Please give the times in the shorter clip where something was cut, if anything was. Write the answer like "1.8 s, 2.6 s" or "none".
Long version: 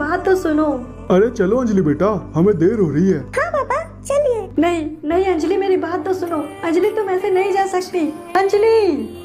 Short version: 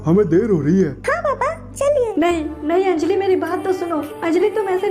2.1 s